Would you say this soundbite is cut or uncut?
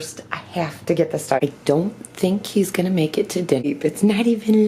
cut